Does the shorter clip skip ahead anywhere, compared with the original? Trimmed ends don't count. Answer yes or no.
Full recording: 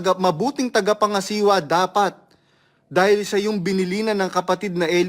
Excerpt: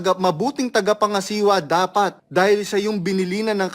yes